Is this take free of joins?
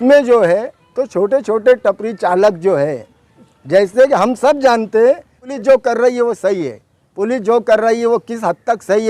no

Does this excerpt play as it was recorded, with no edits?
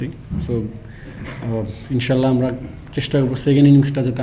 yes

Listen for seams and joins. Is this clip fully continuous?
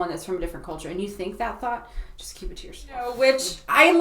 no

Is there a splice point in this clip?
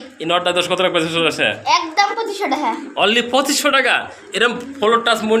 no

